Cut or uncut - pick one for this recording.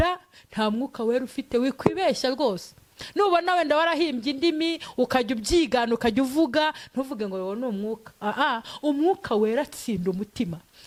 uncut